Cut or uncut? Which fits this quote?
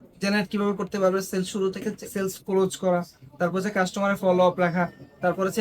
cut